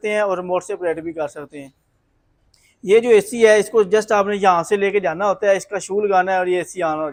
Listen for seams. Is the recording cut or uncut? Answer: uncut